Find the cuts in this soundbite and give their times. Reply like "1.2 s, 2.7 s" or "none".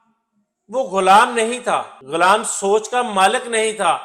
2.0 s

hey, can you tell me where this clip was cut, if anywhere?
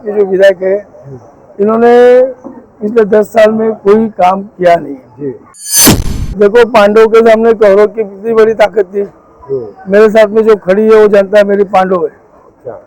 5.9 s

